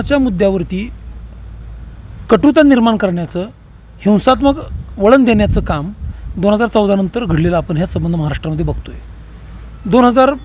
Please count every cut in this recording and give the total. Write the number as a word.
zero